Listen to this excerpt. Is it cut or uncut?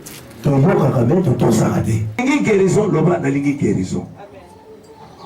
cut